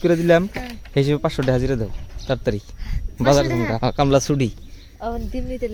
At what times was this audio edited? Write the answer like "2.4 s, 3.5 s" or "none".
none